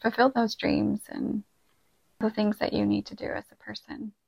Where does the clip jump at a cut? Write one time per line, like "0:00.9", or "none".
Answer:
none